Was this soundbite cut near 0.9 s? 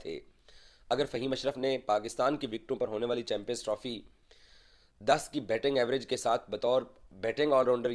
no; 0 cuts

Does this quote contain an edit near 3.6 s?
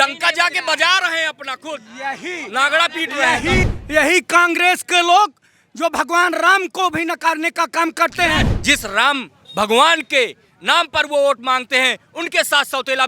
yes; 2 cuts; at 3.6 s, 8.5 s

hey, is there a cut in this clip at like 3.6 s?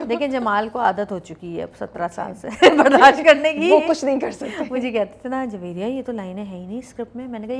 no; 0 cuts

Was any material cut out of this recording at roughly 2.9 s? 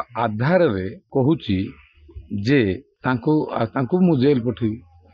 yes; 2 cuts; at 1.0 s, 2.9 s

